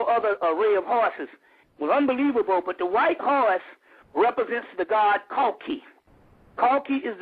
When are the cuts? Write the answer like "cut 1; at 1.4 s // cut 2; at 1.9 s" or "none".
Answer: cut 1; at 5.3 s